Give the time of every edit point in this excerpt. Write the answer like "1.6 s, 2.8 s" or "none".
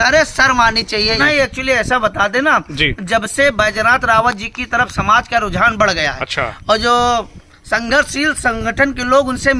1.2 s